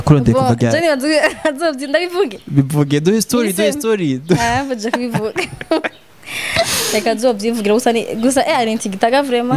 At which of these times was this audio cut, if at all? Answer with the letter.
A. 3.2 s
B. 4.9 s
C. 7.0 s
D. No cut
D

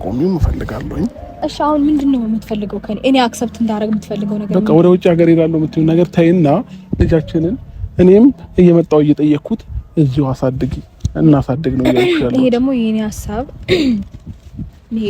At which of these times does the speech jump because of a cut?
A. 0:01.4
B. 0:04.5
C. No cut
A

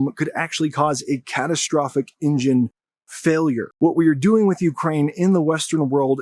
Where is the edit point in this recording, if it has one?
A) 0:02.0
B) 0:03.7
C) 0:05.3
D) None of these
B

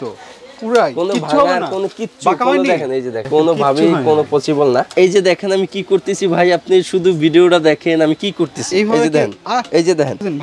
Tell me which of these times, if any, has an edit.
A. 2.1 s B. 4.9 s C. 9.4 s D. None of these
B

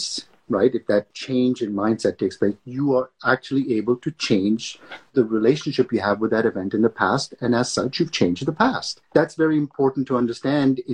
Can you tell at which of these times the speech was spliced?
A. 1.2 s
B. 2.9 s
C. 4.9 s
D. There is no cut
A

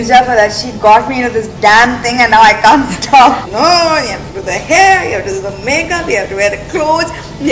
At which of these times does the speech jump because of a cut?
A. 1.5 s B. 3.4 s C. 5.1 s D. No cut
B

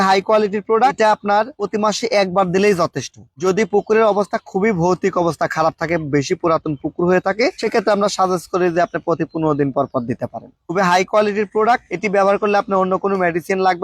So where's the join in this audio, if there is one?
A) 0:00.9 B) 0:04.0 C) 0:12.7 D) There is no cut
A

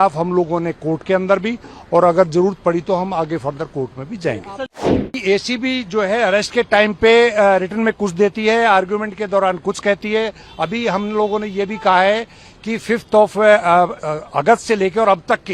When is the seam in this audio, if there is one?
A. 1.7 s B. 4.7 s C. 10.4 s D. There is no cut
B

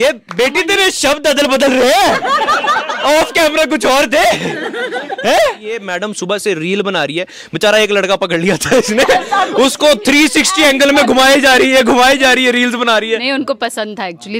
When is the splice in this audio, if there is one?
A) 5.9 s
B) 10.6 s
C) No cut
A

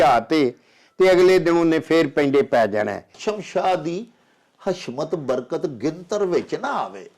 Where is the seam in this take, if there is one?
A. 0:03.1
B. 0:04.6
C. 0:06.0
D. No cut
A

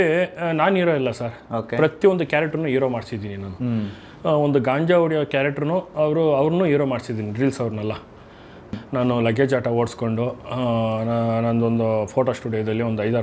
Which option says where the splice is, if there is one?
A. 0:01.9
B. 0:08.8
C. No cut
B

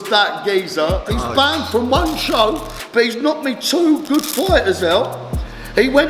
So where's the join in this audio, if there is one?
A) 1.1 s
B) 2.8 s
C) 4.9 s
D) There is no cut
A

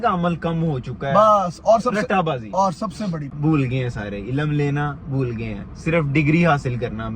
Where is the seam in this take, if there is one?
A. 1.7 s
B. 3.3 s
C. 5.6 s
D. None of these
B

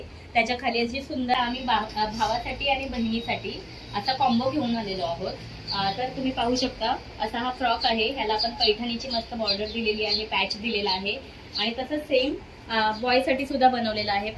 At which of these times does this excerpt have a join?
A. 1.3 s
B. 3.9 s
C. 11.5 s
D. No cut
A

